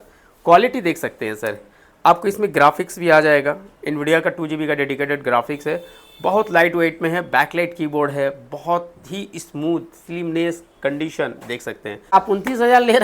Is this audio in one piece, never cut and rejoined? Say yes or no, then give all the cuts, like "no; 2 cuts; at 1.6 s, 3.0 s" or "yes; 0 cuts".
no; 1 cut; at 12.1 s